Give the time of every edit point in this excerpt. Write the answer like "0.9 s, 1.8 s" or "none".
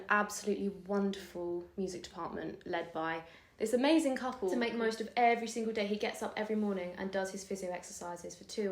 1.7 s, 4.5 s

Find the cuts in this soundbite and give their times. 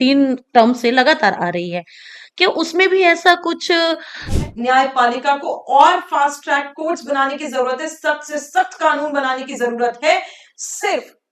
4.3 s

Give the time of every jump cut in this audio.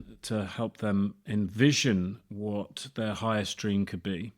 none

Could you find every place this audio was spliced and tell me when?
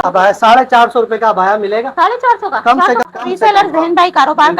3.1 s

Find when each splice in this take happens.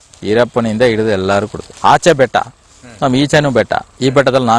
1.6 s

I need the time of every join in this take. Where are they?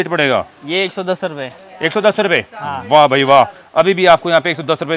none

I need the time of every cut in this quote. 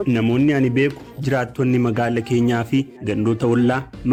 none

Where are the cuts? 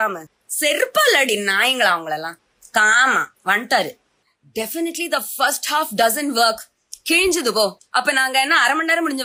none

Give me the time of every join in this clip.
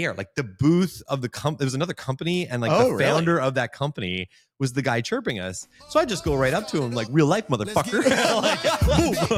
none

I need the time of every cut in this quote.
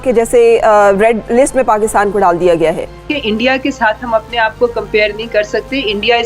3.0 s

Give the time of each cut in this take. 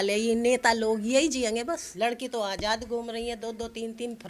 1.9 s

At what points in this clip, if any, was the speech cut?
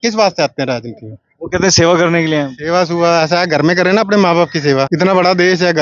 4.9 s

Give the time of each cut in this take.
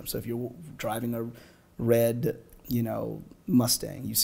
none

